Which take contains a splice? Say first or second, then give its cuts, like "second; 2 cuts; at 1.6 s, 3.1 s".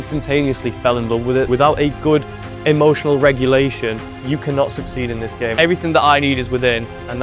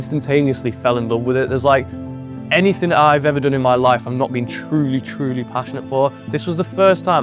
first; 3 cuts; at 1.5 s, 4.1 s, 5.5 s